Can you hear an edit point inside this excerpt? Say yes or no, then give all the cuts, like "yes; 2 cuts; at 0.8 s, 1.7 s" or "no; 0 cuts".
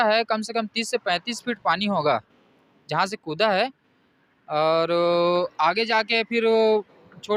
no; 0 cuts